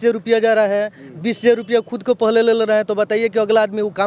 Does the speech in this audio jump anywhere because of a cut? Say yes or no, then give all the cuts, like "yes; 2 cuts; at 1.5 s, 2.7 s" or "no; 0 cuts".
no; 0 cuts